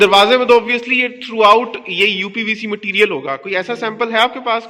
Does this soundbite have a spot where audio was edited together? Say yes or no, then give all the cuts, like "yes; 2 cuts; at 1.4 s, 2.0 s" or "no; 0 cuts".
no; 0 cuts